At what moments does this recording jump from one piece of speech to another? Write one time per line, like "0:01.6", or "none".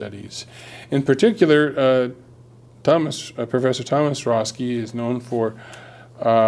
0:03.6